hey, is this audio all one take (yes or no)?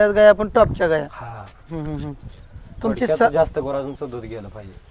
yes